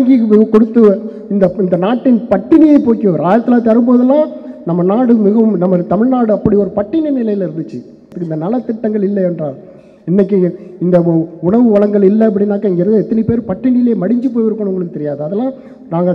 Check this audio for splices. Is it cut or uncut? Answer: cut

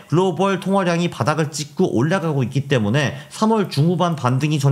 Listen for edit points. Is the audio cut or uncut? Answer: uncut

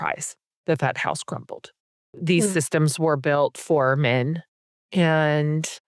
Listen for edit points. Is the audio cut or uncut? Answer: cut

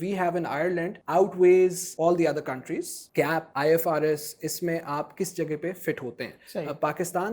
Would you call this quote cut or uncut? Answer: cut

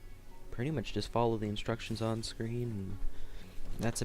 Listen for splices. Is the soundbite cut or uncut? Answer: cut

